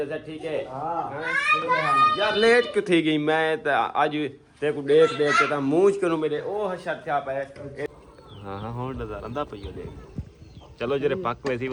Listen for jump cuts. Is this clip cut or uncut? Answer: cut